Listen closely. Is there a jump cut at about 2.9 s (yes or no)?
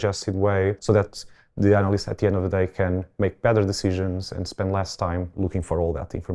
no